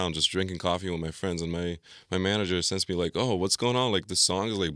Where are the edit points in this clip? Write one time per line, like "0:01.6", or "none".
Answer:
none